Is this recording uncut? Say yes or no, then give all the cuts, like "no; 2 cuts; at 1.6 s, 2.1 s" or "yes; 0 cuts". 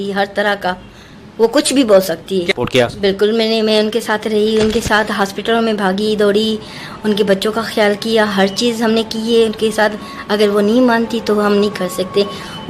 no; 1 cut; at 2.5 s